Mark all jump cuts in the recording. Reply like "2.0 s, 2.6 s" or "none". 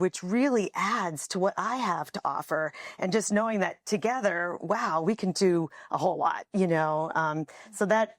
none

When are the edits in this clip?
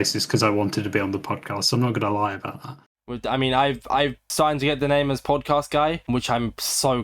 2.7 s

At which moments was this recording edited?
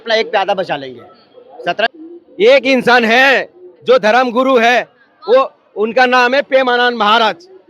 1.9 s

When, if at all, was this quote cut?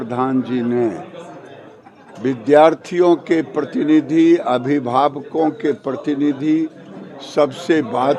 none

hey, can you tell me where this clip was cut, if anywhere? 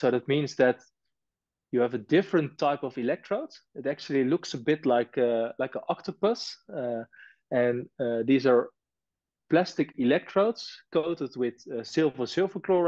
none

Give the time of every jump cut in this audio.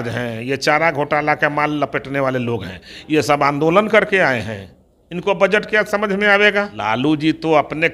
6.7 s

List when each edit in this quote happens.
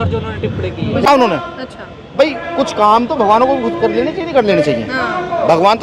1.1 s

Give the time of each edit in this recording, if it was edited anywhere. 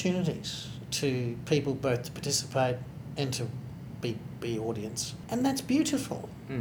5.1 s

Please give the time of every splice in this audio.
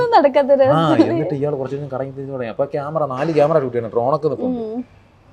none

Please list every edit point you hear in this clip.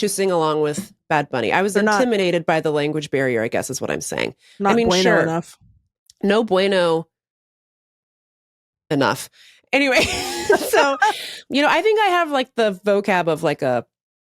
11.3 s

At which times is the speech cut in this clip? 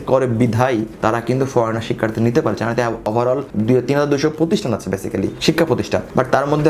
3.2 s

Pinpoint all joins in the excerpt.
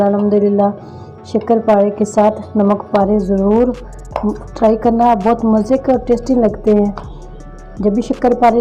none

